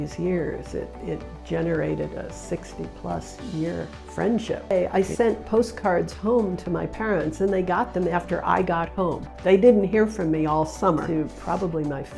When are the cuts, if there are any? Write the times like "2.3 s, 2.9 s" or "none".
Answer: 4.7 s, 11.1 s